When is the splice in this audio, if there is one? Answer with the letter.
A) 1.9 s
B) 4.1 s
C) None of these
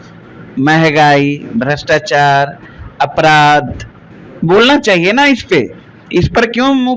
C